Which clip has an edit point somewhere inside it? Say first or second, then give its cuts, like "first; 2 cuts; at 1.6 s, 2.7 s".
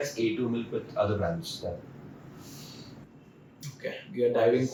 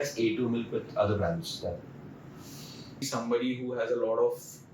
second; 1 cut; at 3.1 s